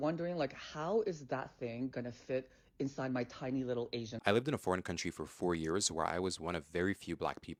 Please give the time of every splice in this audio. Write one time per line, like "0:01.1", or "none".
none